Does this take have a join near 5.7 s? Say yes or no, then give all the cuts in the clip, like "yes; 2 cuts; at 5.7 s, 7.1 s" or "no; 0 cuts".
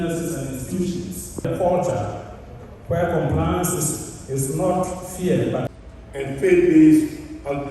yes; 1 cut; at 5.7 s